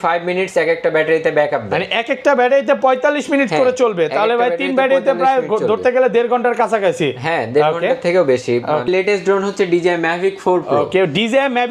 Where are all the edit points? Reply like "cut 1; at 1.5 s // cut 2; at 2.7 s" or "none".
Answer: cut 1; at 8.9 s